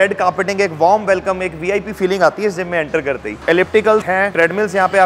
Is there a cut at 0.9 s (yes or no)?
no